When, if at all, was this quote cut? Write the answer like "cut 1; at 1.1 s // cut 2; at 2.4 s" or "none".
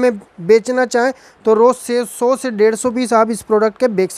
none